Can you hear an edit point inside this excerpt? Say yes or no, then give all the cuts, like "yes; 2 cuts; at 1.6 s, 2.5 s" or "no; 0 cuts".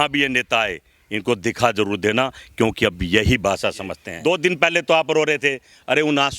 yes; 1 cut; at 4.0 s